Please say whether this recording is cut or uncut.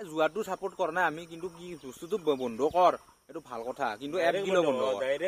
uncut